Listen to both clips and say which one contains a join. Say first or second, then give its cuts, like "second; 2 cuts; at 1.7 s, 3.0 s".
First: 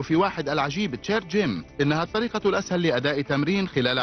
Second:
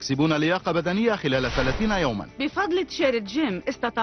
second; 1 cut; at 2.3 s